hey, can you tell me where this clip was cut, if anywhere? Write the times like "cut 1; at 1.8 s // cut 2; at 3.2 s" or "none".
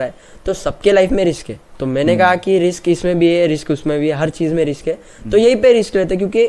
none